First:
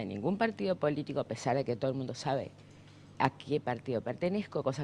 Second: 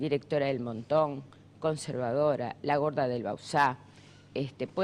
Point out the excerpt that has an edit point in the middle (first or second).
first